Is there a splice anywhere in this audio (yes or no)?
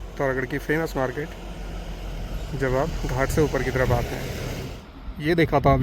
yes